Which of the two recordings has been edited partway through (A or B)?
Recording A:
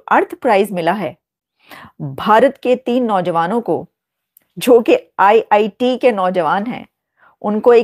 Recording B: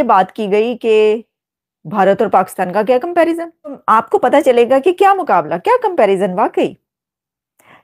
B